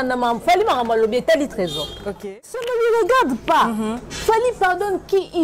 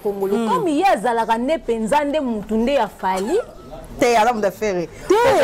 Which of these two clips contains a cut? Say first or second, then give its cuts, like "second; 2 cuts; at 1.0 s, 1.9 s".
first; 1 cut; at 2.2 s